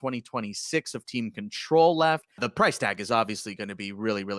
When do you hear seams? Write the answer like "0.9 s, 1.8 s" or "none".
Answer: 2.4 s